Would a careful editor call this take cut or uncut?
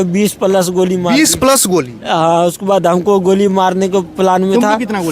uncut